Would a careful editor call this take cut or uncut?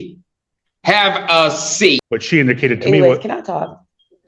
cut